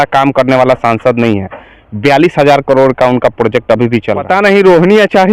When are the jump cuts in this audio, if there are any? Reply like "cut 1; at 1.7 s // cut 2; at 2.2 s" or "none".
cut 1; at 4.2 s